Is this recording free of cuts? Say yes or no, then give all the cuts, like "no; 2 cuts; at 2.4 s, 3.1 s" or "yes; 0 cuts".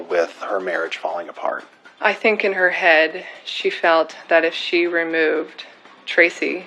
no; 1 cut; at 1.9 s